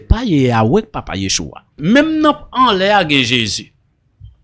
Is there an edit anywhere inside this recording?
yes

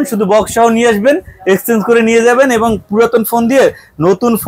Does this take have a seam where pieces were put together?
no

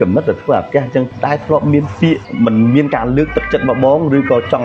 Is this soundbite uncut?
no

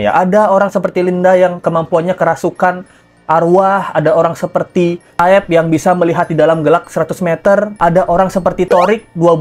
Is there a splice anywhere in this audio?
no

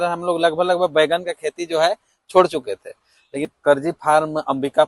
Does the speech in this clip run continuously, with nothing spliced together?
no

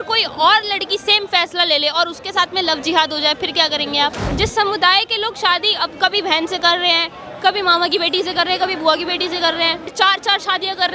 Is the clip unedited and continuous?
no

